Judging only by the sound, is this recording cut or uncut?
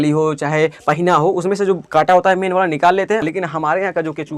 cut